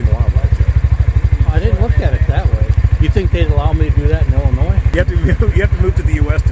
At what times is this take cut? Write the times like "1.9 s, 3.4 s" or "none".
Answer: 2.8 s, 4.8 s